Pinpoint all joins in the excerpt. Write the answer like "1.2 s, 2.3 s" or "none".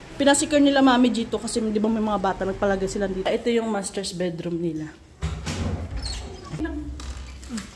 3.3 s, 6.6 s